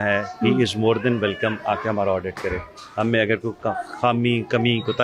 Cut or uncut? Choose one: uncut